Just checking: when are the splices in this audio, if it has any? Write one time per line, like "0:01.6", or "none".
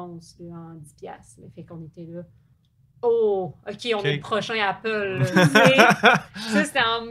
none